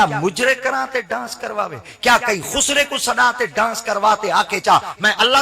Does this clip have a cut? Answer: no; 0 cuts

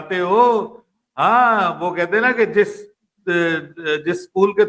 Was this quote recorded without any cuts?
yes; 0 cuts

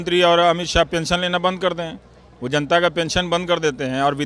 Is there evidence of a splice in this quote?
no; 0 cuts

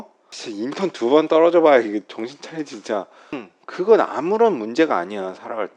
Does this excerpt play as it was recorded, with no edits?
no; 1 cut; at 3.5 s

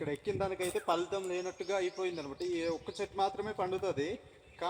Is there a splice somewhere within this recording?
no; 0 cuts

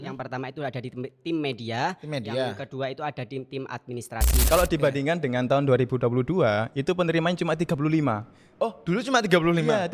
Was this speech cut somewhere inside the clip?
yes; 1 cut; at 4.4 s

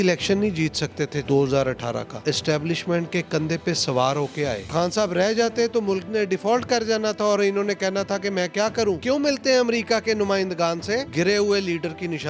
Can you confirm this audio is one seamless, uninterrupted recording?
no; 5 cuts; at 1.2 s, 2.2 s, 4.7 s, 9.0 s, 11.1 s

